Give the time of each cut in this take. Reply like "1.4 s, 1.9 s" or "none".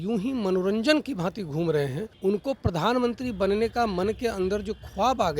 2.0 s